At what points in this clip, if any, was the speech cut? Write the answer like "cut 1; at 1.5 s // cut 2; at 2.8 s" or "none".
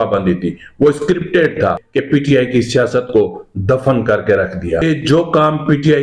cut 1; at 1.8 s // cut 2; at 4.8 s

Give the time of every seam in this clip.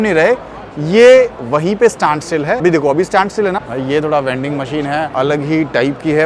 cut 1; at 2.6 s // cut 2; at 3.7 s // cut 3; at 5.1 s

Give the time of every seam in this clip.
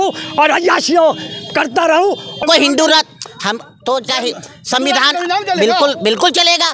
cut 1; at 2.4 s

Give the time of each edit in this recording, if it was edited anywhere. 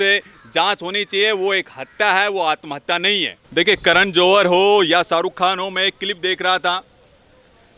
cut 1; at 3.4 s

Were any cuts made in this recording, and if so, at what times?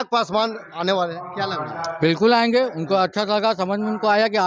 none

